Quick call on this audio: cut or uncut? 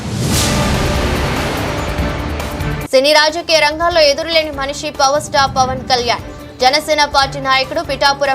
uncut